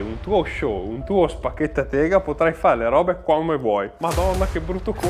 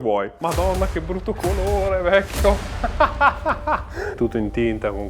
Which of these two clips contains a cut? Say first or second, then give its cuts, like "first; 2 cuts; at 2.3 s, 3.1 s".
second; 2 cuts; at 2.7 s, 4.2 s